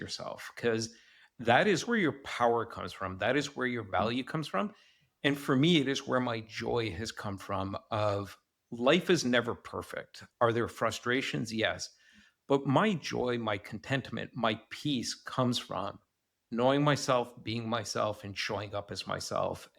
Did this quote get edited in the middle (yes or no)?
yes